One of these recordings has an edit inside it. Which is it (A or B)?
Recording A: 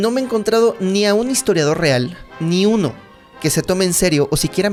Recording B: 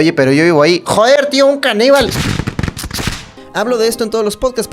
B